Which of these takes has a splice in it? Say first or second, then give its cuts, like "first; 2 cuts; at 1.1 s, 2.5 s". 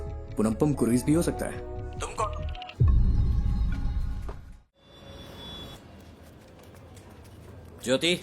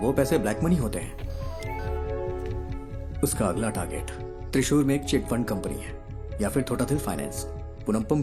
first; 2 cuts; at 2.6 s, 4.8 s